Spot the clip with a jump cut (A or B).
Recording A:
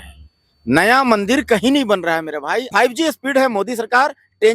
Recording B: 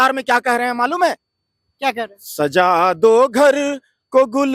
A